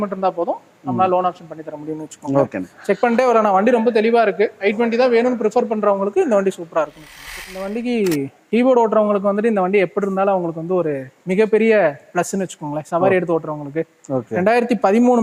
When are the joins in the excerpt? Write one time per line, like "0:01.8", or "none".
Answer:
none